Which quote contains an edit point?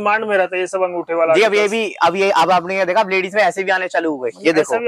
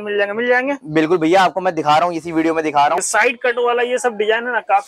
second; 1 cut; at 3.0 s

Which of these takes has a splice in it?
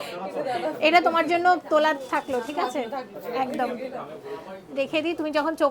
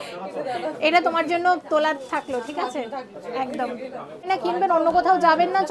second; 1 cut; at 4.3 s

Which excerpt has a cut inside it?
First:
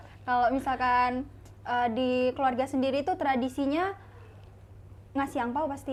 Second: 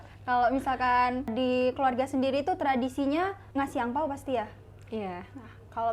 second; 2 cuts; at 1.3 s, 3.4 s

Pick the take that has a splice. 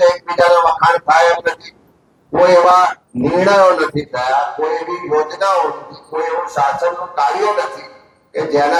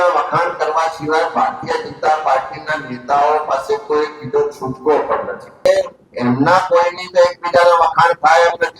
second; 1 cut; at 5.7 s

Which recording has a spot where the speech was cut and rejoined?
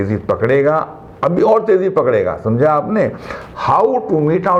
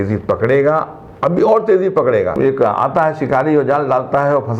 second; 1 cut; at 2.3 s

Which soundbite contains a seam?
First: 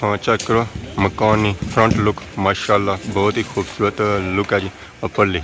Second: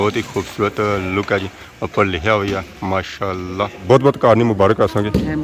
second; 1 cut; at 3.8 s

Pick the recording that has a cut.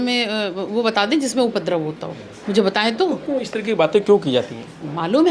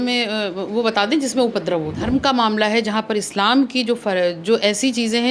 second; 1 cut; at 2.0 s

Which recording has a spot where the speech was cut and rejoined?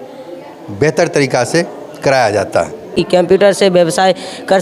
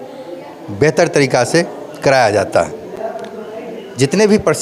first; 1 cut; at 3.1 s

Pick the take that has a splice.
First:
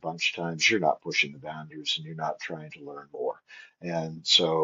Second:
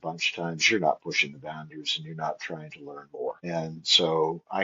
second; 1 cut; at 3.4 s

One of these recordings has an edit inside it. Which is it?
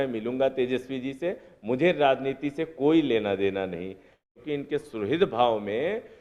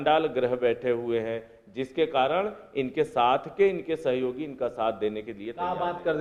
first; 1 cut; at 4.3 s

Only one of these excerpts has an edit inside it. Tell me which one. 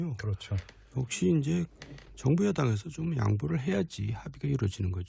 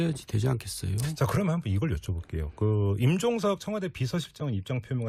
first; 1 cut; at 3.5 s

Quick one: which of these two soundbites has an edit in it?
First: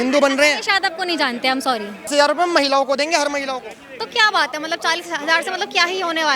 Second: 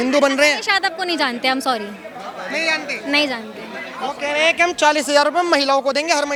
first; 1 cut; at 2.1 s

